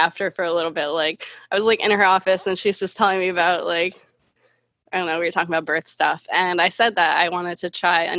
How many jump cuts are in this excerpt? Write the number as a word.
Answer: zero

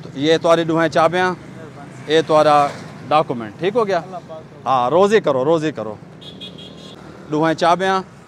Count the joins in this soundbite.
zero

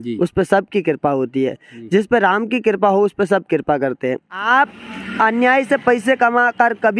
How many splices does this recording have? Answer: one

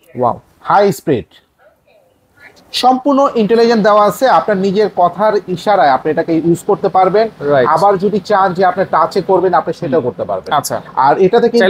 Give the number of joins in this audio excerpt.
zero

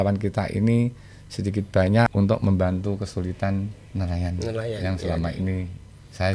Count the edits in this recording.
two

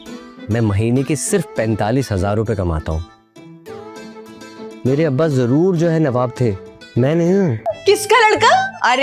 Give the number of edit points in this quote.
one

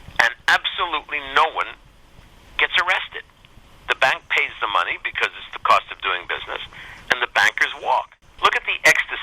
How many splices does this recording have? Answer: one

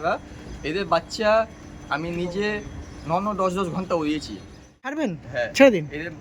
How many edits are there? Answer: one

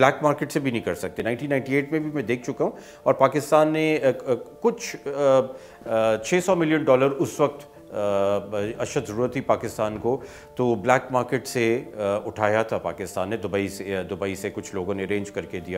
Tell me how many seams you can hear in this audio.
one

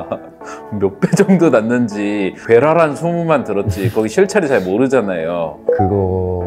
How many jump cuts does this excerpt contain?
one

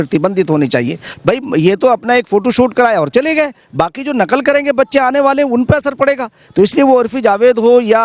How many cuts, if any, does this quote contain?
one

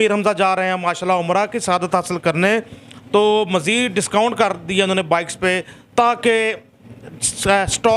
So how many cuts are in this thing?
zero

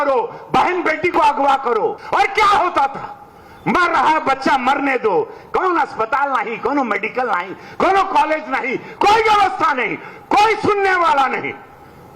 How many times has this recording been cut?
one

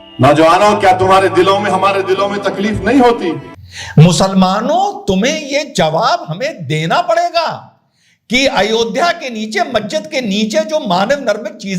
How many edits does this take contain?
one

